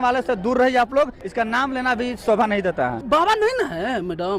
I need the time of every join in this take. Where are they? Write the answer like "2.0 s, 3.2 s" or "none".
1.2 s, 3.0 s

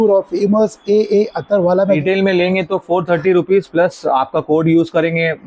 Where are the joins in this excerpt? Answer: 2.0 s

